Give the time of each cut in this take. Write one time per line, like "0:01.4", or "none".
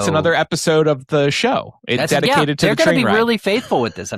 none